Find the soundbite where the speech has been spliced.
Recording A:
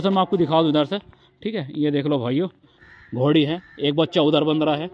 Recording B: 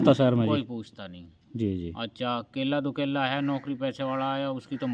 A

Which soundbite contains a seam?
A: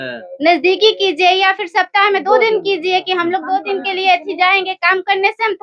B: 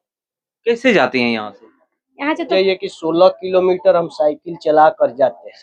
B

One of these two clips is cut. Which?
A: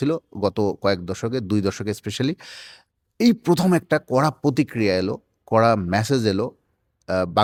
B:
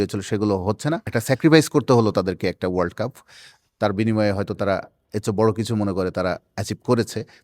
B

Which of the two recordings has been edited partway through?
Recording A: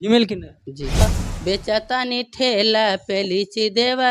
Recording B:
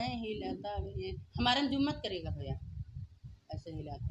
A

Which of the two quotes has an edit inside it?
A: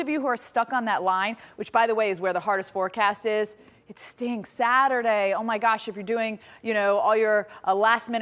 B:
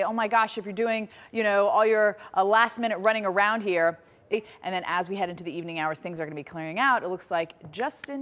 B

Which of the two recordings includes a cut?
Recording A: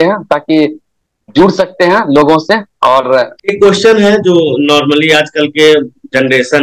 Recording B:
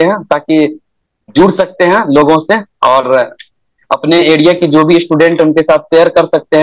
A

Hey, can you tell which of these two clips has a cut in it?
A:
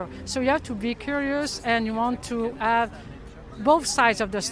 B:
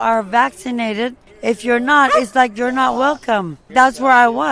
B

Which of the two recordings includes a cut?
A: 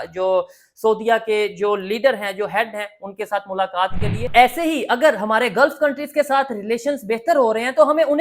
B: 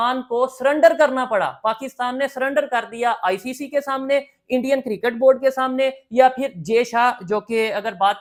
A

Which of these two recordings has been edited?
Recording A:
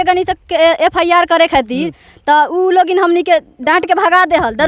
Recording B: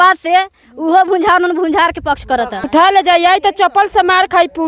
B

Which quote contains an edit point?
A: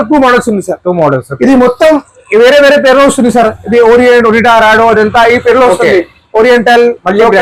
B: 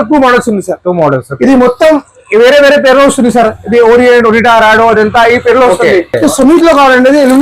B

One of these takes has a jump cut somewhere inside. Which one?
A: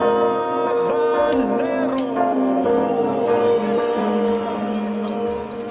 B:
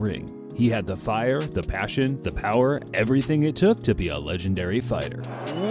A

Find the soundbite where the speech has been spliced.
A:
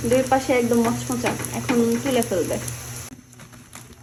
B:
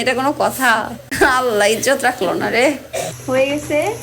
B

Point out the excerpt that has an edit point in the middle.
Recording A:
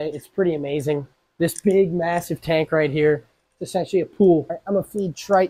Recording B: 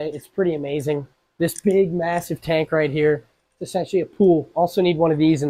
A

